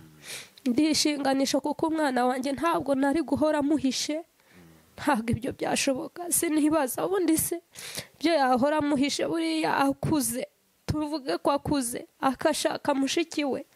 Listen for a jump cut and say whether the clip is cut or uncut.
uncut